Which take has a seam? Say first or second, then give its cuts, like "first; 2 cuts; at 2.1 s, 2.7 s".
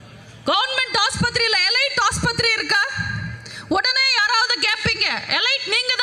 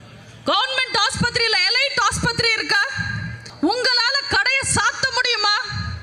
second; 1 cut; at 3.4 s